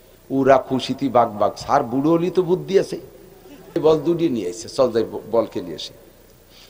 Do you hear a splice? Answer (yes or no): yes